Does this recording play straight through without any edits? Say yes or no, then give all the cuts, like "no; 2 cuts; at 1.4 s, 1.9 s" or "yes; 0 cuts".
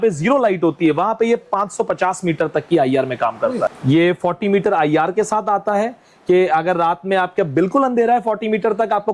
no; 1 cut; at 3.7 s